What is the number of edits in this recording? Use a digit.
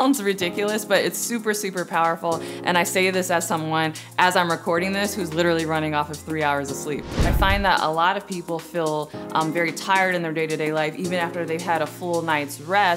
1